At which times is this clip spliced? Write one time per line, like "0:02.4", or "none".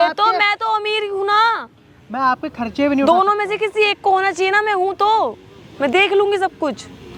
none